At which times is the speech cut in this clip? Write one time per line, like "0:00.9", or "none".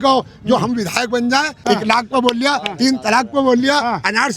0:01.5